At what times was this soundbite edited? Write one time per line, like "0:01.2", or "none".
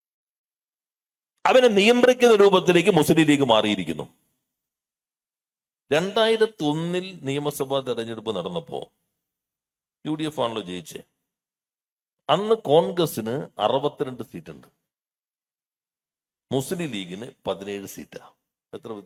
none

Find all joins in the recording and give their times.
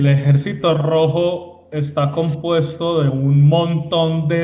none

